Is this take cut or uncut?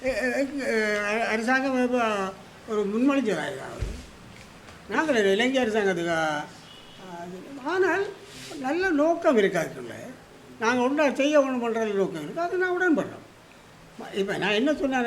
uncut